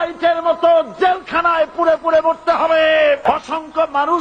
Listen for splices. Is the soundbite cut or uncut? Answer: cut